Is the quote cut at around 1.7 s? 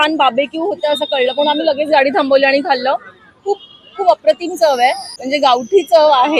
no; 1 cut; at 5.1 s

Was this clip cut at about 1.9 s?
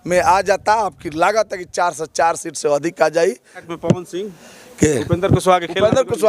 no; 1 cut; at 3.7 s

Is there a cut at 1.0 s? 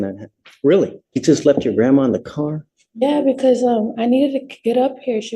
yes; 1 cut; at 1.0 s

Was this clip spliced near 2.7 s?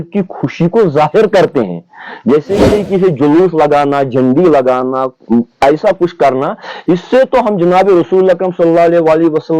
yes; 1 cut; at 2.7 s

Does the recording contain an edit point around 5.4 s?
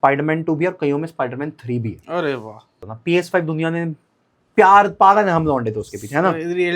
no; 1 cut; at 2.9 s

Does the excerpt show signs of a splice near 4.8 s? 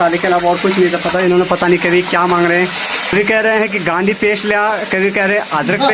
no; 1 cut; at 3.1 s

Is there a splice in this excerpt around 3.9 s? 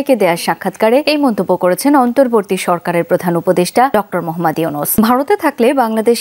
yes; 3 cuts; at 1.0 s, 3.9 s, 5.0 s

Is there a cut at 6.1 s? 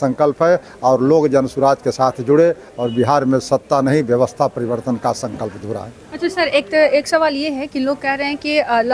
no; 0 cuts

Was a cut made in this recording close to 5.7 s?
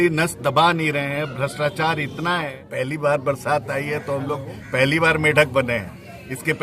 no; 1 cut; at 2.5 s

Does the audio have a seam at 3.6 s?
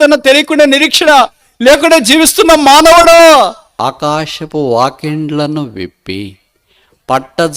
yes; 1 cut; at 3.6 s

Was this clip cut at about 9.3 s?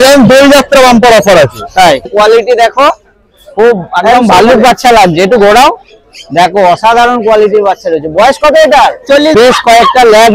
yes; 2 cuts; at 2.1 s, 9.3 s

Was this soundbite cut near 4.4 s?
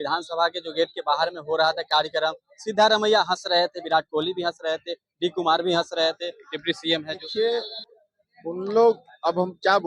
no; 1 cut; at 7.2 s

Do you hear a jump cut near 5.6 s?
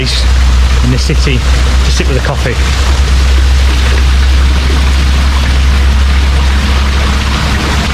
no; 0 cuts

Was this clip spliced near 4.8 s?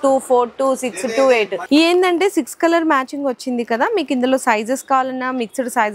no; 1 cut; at 1.6 s

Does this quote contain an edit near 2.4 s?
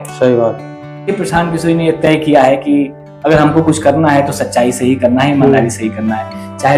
no; 1 cut; at 1.1 s

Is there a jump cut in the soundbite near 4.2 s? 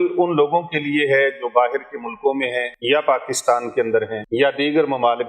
yes; 2 cuts; at 2.7 s, 4.2 s

